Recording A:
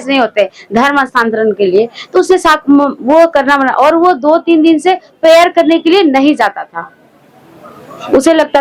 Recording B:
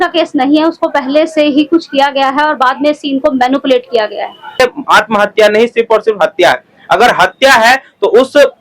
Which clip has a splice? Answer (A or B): B